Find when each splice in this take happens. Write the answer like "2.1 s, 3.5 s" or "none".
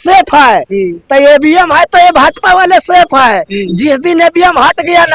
none